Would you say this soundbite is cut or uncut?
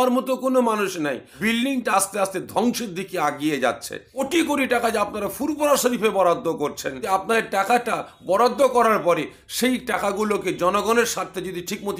cut